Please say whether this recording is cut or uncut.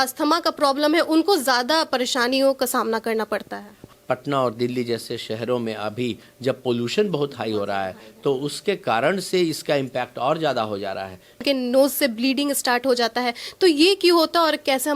cut